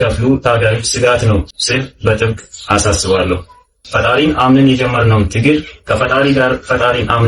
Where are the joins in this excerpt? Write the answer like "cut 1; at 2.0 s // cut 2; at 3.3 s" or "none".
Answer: cut 1; at 1.6 s // cut 2; at 3.7 s